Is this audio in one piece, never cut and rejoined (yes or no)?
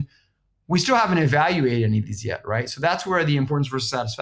yes